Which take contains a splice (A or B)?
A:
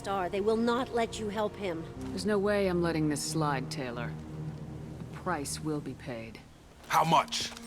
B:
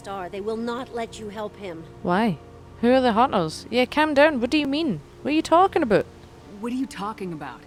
A